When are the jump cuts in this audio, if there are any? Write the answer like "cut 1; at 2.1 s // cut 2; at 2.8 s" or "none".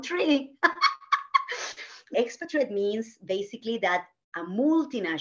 cut 1; at 2.1 s